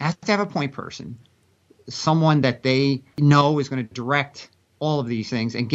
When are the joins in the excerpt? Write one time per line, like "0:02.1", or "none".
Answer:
0:03.1